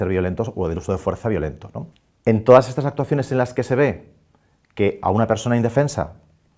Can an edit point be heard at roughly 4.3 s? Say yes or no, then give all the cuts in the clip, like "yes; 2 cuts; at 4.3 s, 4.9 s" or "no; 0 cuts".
yes; 1 cut; at 4.3 s